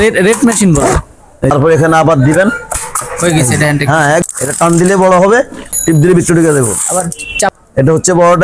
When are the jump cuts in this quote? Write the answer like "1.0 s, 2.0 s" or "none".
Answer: 1.4 s, 4.2 s, 5.8 s, 7.5 s

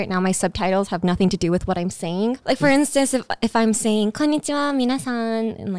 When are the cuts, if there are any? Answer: 2.4 s

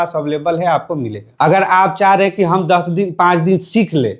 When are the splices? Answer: 1.2 s

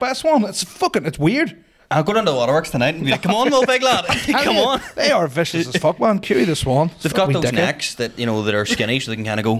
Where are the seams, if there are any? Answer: none

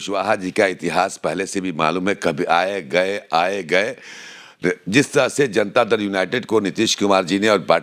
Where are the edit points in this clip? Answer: none

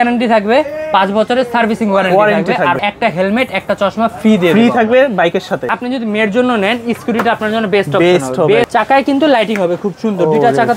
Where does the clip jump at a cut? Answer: 2.8 s, 5.7 s, 8.7 s

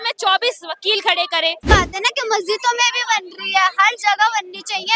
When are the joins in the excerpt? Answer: 1.7 s

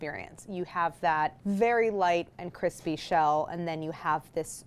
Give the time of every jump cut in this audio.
1.4 s

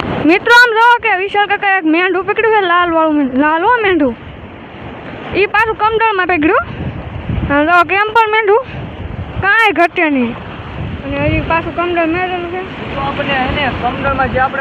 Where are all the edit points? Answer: none

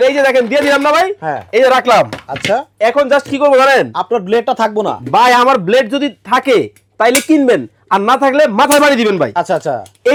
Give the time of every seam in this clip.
none

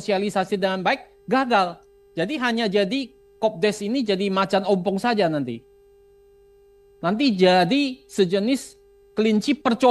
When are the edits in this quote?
none

